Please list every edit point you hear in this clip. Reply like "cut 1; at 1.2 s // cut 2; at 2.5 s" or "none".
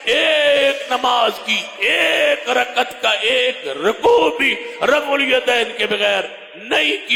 none